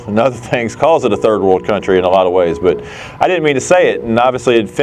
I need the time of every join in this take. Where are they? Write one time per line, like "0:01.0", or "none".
none